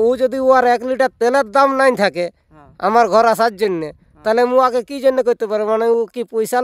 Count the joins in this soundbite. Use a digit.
0